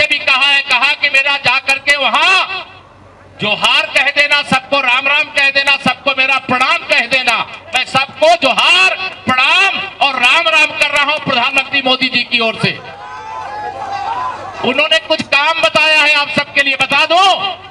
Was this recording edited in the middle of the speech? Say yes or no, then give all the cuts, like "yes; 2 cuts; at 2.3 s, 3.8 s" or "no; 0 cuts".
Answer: no; 0 cuts